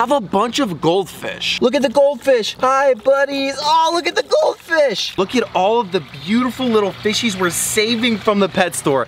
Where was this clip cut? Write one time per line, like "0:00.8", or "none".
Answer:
0:01.5
0:02.5
0:05.1

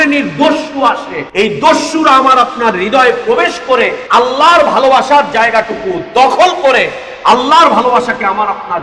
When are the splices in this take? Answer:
0:01.2
0:04.0

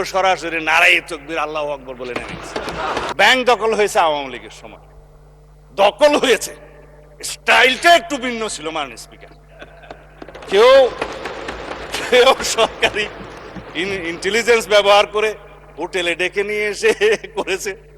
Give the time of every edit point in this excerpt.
0:03.1

